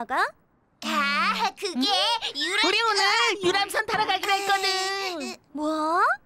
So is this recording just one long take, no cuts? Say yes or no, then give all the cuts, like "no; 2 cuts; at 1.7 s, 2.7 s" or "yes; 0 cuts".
yes; 0 cuts